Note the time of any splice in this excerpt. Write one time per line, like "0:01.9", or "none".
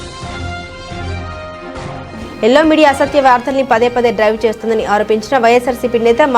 0:00.9